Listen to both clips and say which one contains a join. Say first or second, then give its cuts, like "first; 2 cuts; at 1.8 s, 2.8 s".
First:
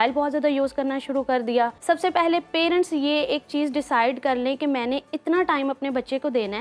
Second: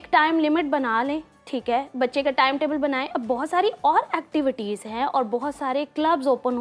first; 1 cut; at 1.8 s